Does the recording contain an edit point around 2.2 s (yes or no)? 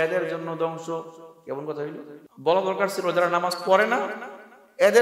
yes